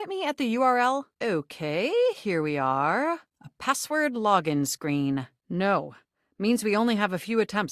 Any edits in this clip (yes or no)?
yes